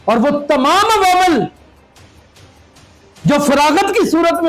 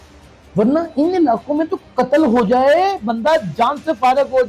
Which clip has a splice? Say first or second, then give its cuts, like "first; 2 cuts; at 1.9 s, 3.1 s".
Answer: first; 2 cuts; at 1.7 s, 3.2 s